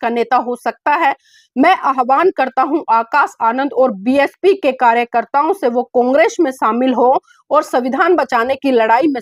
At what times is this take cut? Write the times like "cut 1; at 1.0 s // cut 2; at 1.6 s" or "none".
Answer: none